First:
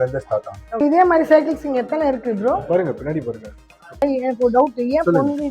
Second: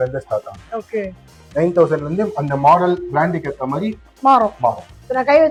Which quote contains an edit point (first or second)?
first